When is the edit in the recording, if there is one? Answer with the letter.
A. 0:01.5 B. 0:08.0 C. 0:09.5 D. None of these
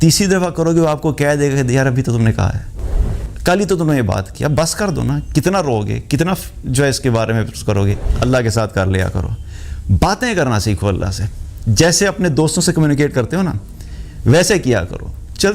B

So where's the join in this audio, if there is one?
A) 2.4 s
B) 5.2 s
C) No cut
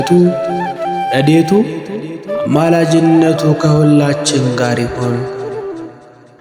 B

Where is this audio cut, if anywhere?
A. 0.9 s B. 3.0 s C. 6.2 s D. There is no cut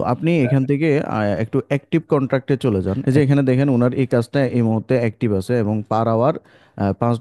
B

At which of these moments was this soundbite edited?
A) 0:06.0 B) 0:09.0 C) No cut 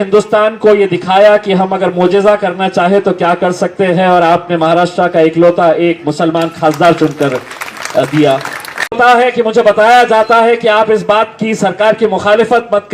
B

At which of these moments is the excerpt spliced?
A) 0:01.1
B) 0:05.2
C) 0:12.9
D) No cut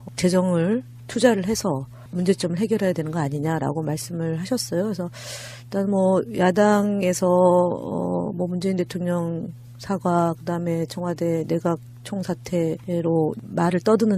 C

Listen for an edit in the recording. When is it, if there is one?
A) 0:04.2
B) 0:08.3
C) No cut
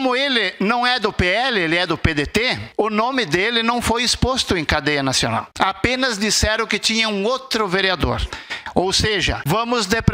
B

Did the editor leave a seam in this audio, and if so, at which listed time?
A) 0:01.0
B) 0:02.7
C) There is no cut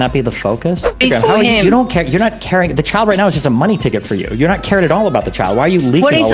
A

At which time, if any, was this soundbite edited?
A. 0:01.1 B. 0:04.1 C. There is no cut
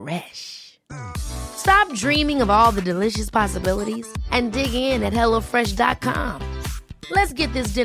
C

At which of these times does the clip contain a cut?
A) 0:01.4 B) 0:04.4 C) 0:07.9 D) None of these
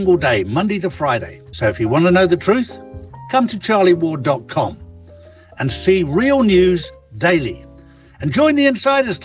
A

